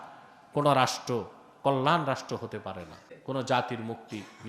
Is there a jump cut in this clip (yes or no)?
yes